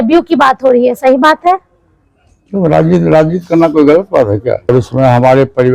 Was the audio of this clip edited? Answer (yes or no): yes